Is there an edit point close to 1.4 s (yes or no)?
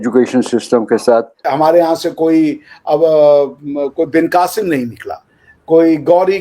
yes